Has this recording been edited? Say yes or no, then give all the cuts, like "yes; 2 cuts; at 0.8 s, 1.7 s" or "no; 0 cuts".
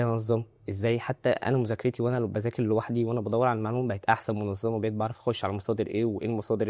no; 0 cuts